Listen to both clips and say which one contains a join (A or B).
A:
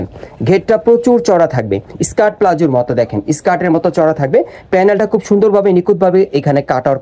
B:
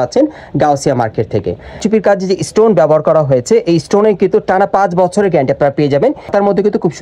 B